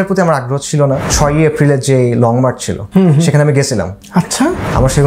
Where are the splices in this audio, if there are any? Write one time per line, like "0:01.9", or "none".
0:01.1
0:02.7
0:04.0